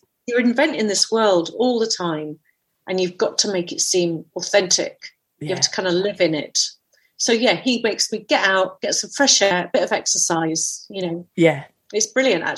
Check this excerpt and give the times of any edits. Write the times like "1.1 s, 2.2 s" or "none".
6.8 s, 9.5 s